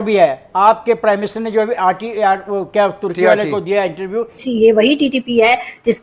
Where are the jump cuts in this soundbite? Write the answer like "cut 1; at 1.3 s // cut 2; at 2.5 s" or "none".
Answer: cut 1; at 4.3 s